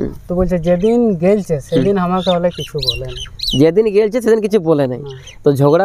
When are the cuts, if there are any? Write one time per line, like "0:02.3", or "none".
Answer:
none